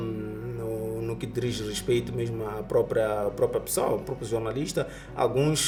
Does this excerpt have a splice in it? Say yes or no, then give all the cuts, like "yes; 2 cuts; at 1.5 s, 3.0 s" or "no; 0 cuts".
no; 0 cuts